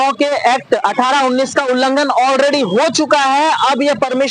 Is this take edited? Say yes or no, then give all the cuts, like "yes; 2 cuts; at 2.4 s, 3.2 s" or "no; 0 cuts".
no; 0 cuts